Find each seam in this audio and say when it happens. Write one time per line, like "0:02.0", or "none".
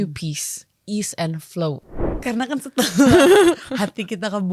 0:02.1